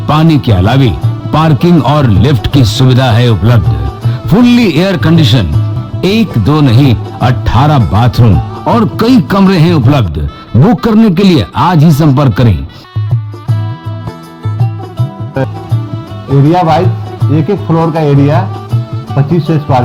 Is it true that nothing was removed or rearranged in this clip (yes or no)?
yes